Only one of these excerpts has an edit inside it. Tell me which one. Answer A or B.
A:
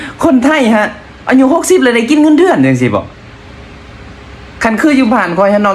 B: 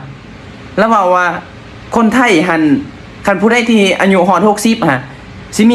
A